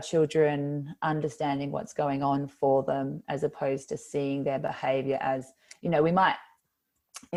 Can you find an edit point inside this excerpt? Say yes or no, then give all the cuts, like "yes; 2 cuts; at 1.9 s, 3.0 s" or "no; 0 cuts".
no; 0 cuts